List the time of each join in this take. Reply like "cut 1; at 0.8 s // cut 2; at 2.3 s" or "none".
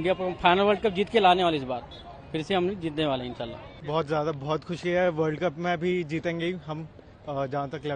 cut 1; at 3.9 s